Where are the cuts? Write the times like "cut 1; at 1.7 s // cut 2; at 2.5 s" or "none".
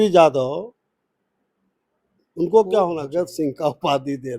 cut 1; at 3.0 s